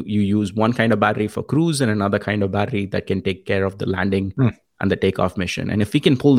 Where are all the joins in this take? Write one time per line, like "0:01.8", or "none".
none